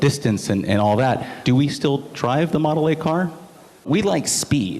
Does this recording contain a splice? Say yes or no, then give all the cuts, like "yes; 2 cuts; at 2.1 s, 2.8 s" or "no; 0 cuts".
yes; 2 cuts; at 1.4 s, 3.9 s